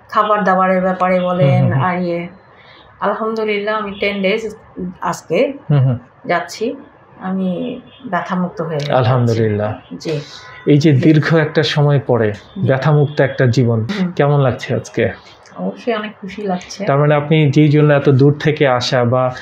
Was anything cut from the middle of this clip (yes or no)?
yes